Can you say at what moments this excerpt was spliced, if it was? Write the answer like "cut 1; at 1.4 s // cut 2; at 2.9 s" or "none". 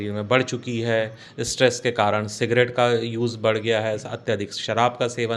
none